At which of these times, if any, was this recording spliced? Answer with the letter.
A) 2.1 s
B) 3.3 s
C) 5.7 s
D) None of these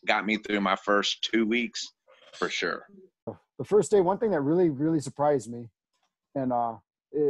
B